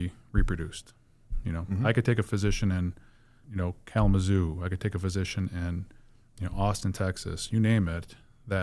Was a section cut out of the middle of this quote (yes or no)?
yes